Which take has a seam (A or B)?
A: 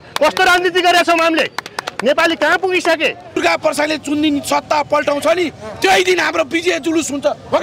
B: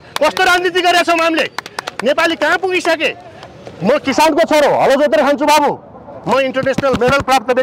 A